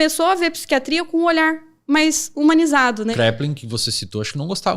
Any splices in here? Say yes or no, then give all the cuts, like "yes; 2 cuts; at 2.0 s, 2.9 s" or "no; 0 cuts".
yes; 1 cut; at 3.1 s